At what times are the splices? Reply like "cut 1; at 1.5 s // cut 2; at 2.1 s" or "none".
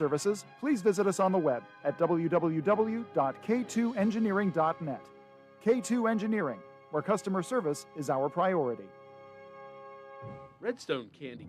cut 1; at 10.4 s